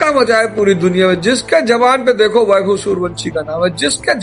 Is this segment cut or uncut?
uncut